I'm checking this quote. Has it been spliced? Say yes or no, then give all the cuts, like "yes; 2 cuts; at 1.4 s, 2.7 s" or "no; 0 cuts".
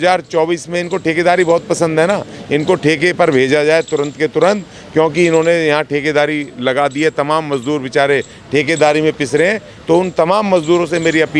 no; 0 cuts